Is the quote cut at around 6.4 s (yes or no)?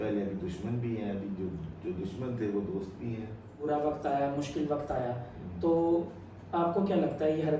no